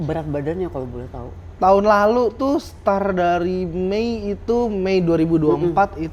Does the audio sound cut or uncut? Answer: uncut